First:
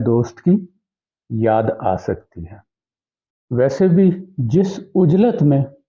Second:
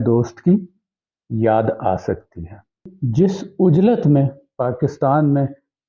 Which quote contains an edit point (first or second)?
second